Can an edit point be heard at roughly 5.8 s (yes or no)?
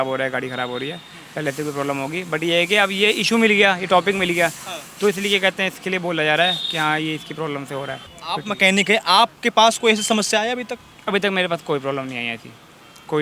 no